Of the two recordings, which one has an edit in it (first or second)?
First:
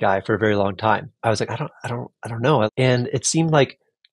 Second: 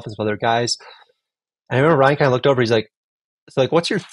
first